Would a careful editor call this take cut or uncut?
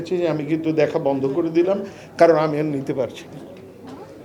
uncut